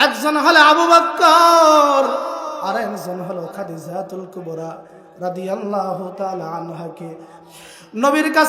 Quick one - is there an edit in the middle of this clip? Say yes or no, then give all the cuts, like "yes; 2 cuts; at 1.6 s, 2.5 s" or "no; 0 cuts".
yes; 1 cut; at 7.3 s